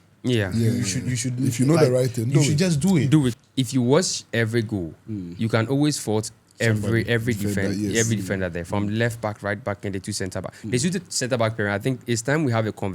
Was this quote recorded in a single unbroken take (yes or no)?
no